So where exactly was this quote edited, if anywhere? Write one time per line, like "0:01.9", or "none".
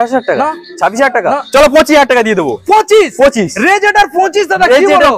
none